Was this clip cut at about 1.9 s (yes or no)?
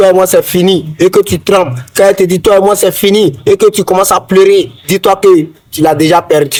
no